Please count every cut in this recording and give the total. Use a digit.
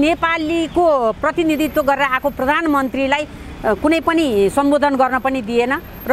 0